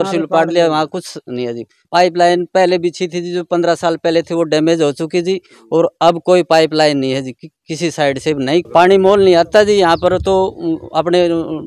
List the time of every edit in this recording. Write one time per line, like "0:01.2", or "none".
0:01.8
0:08.7